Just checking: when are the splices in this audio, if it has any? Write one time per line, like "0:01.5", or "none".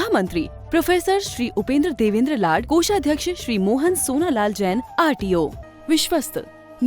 0:05.6